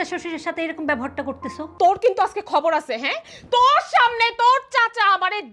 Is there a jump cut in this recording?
yes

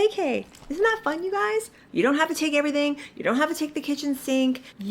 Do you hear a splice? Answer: yes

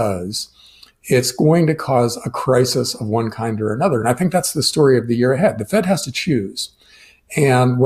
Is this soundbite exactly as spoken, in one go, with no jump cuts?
yes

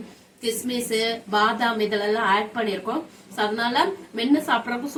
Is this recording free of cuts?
yes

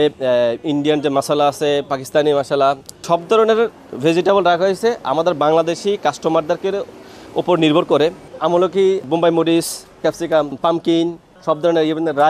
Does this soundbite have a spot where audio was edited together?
yes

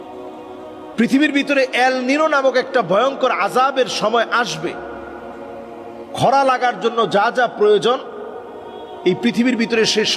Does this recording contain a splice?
yes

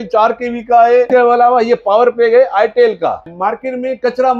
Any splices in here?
yes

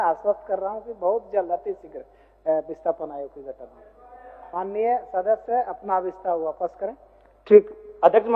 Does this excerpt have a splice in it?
no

